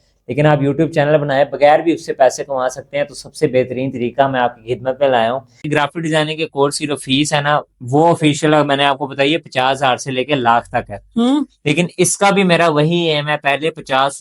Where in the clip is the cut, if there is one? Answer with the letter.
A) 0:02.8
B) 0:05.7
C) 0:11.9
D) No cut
B